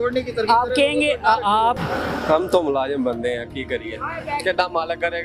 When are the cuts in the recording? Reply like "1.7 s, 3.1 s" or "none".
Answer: 1.8 s